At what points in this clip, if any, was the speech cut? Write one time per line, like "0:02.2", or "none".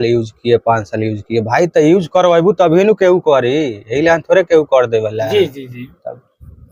none